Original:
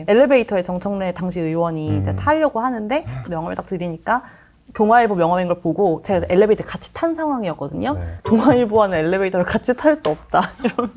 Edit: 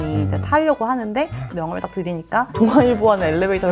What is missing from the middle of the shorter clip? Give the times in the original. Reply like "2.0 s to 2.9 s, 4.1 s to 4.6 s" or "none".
4.3 s to 8.2 s